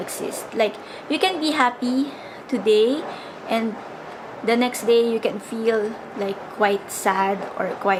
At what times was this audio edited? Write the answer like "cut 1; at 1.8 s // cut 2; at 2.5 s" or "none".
none

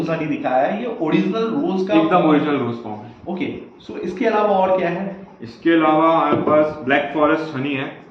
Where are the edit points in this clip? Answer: none

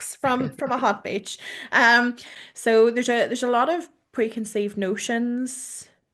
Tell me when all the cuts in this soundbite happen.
cut 1; at 2.3 s

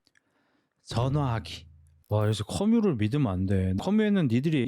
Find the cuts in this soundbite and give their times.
cut 1; at 2.0 s // cut 2; at 3.8 s

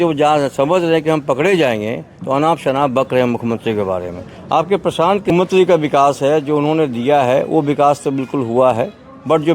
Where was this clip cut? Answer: cut 1; at 5.3 s

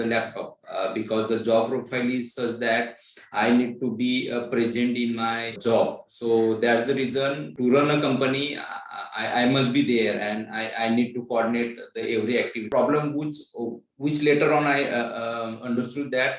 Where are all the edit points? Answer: cut 1; at 5.6 s // cut 2; at 7.5 s // cut 3; at 12.7 s

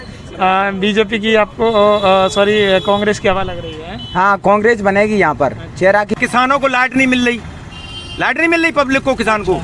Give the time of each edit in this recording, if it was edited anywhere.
cut 1; at 6.1 s

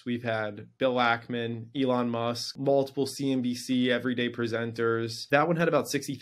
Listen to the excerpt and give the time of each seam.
cut 1; at 2.5 s // cut 2; at 5.1 s

